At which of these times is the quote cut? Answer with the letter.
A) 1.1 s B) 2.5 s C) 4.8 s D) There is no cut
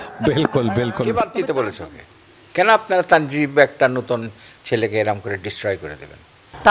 A